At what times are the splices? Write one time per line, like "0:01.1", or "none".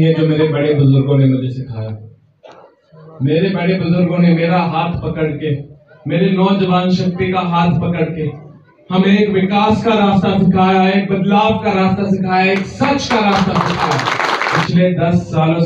0:14.6